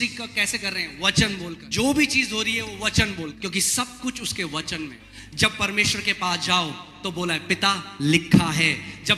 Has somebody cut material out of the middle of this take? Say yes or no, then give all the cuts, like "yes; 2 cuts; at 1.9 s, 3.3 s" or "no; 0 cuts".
yes; 3 cuts; at 1.6 s, 3.4 s, 5.0 s